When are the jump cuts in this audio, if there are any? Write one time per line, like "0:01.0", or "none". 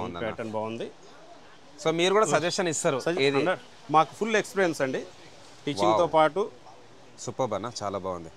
none